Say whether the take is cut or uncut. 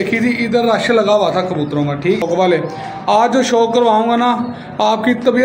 cut